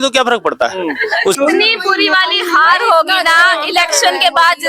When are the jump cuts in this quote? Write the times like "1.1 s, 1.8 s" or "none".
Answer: 1.4 s